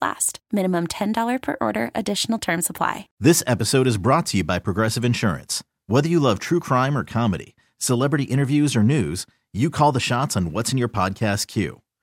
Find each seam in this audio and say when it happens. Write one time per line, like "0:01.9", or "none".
0:03.0